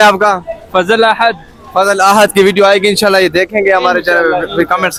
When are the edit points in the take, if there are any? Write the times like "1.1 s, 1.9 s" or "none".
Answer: none